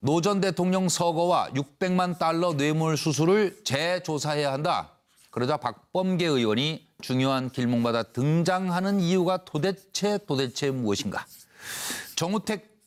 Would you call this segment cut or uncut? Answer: uncut